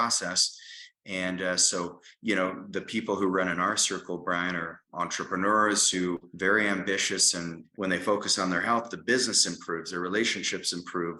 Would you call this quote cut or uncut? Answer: cut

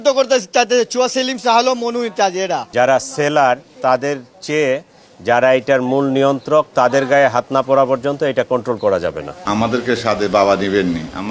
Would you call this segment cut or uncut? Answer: cut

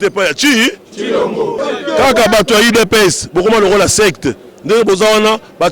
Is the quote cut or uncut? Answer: cut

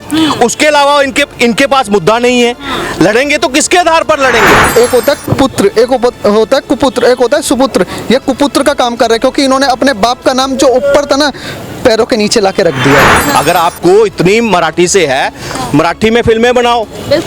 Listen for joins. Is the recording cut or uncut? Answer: cut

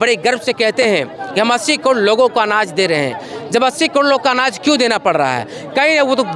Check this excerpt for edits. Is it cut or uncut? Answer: uncut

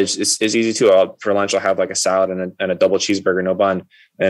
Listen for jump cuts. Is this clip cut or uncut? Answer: uncut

